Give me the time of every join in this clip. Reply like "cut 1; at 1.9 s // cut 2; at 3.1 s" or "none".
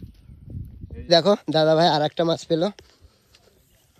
cut 1; at 1.1 s

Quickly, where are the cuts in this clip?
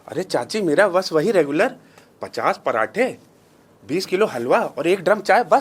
none

